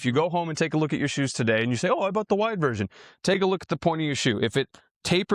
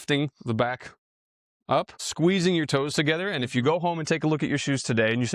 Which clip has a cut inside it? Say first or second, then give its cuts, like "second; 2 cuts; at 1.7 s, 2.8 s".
second; 1 cut; at 2.0 s